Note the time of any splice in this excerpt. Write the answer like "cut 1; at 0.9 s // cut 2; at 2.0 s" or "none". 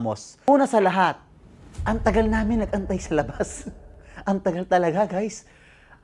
none